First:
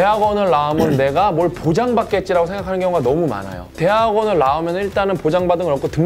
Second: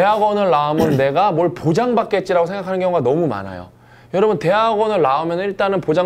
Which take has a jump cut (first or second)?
first